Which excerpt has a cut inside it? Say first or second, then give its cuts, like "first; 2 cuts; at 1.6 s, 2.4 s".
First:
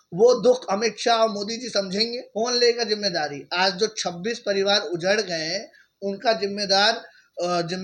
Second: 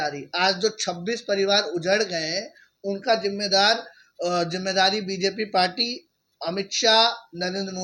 first; 1 cut; at 2.2 s